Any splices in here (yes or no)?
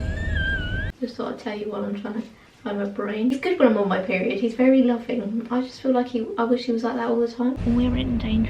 yes